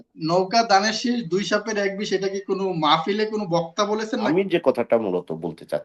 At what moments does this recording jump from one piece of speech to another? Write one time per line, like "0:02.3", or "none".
0:04.3